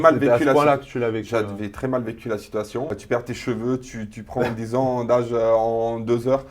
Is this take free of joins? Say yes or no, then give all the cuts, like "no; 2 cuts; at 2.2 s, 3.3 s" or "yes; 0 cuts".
no; 1 cut; at 3.0 s